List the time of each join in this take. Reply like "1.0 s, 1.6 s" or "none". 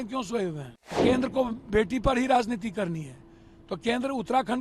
1.0 s